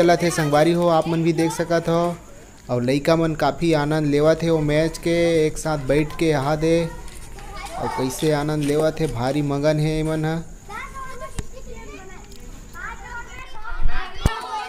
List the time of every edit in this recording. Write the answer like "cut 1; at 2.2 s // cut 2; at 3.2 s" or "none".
none